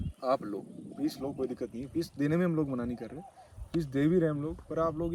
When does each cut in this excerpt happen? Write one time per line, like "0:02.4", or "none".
none